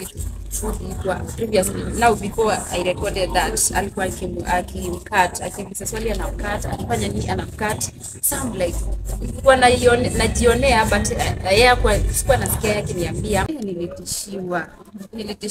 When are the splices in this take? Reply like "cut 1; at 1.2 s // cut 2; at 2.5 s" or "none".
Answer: cut 1; at 13.5 s